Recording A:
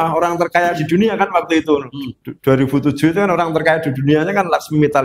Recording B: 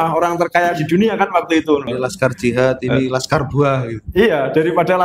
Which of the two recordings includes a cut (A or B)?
B